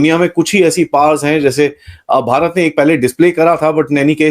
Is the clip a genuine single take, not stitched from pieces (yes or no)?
yes